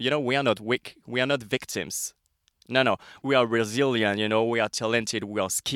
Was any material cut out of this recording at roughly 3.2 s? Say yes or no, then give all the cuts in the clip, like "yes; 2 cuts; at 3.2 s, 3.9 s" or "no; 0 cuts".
yes; 1 cut; at 3.2 s